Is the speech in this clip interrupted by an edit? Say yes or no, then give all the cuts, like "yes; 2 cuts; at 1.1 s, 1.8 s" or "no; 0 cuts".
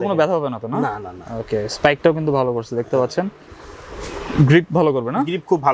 no; 0 cuts